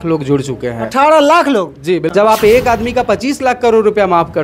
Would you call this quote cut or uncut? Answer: cut